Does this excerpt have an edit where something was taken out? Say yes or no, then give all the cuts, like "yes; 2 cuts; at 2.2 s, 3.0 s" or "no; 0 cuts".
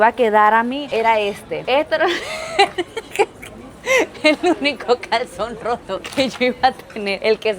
no; 0 cuts